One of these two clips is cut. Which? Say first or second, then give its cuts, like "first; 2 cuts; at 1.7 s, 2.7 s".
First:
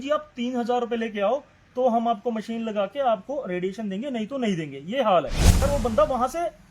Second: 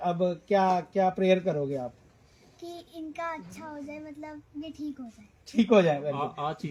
first; 1 cut; at 5.6 s